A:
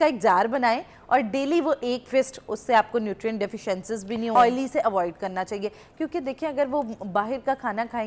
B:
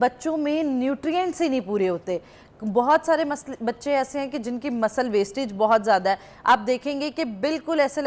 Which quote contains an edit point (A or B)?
A